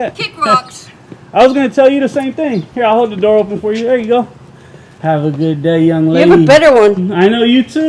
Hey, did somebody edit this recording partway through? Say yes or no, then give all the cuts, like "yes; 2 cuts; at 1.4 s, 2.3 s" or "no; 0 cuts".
no; 0 cuts